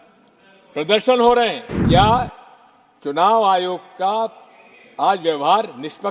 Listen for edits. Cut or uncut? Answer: cut